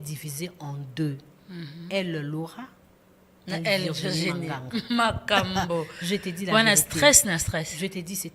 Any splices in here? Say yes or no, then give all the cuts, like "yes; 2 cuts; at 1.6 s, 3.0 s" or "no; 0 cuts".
no; 0 cuts